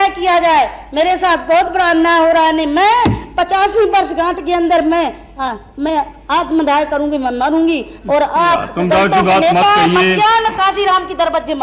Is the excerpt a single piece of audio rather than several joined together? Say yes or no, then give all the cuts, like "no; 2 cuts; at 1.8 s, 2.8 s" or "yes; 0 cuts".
yes; 0 cuts